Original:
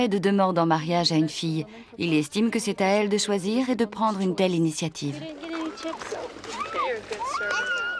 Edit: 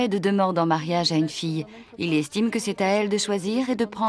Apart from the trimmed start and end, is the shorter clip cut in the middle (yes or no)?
no